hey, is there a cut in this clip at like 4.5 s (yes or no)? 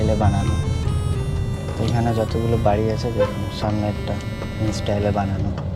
yes